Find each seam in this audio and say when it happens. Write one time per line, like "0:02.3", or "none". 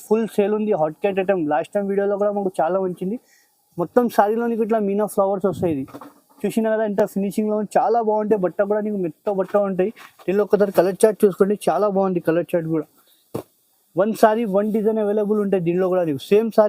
none